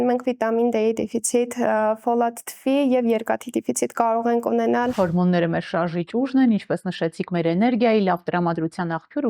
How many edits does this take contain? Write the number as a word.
one